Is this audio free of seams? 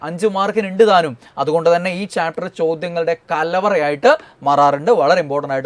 yes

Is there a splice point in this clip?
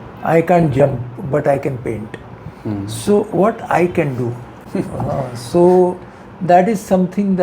no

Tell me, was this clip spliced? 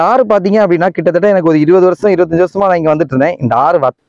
no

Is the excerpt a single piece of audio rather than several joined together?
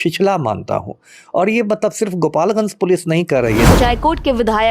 no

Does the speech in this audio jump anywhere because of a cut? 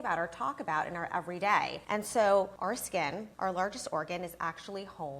yes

